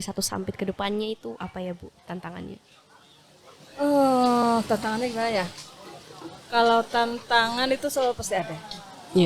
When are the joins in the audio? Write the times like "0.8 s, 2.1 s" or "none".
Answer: none